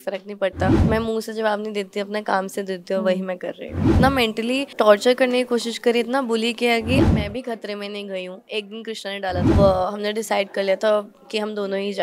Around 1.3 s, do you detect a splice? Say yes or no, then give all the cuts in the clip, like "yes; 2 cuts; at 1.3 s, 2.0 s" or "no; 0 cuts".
no; 3 cuts; at 3.9 s, 7.0 s, 9.5 s